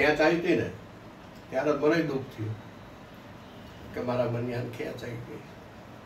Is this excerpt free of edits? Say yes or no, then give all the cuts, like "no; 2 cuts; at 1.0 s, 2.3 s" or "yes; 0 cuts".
yes; 0 cuts